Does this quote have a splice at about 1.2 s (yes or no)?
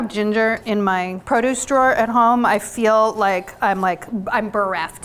yes